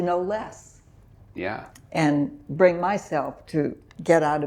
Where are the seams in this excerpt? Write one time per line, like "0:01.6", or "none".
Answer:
none